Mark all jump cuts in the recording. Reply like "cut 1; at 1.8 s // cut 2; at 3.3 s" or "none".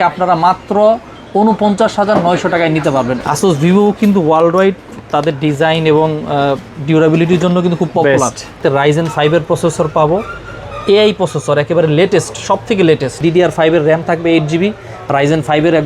cut 1; at 3.2 s // cut 2; at 8.6 s // cut 3; at 13.2 s